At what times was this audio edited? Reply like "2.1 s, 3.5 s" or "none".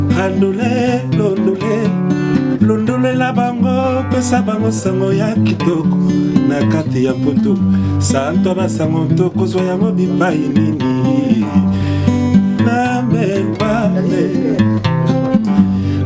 none